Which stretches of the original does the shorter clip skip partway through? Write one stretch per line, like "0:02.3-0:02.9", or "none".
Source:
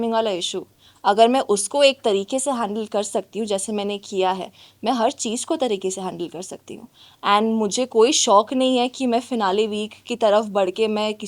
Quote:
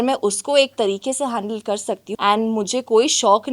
0:03.3-0:07.1

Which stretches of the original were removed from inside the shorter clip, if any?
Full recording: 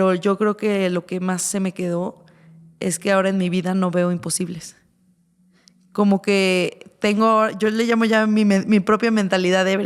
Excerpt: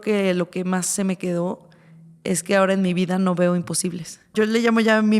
0:04.9-0:07.5

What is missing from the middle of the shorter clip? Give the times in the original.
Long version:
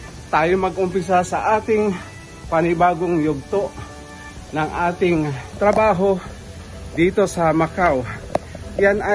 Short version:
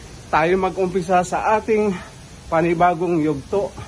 none

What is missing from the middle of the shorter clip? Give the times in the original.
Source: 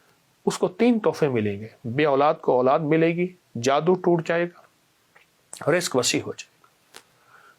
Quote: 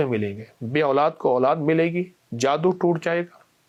none

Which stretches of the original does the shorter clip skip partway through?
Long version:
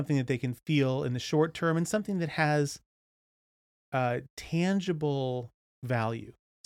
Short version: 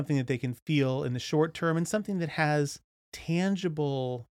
0:03.1-0:04.3

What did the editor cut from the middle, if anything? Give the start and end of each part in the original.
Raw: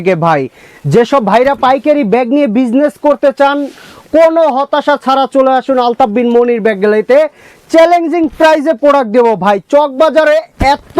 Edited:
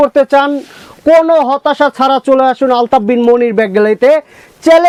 none

